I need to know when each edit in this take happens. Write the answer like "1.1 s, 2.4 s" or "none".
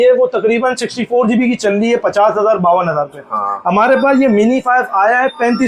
none